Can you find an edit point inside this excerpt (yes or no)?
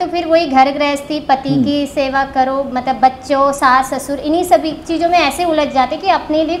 no